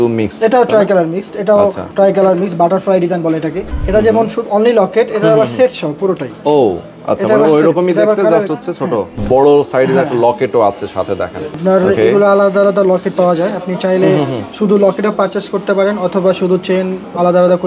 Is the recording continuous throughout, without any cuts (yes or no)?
no